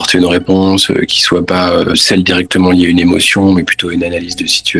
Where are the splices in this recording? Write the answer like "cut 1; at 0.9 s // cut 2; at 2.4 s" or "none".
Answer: cut 1; at 2.0 s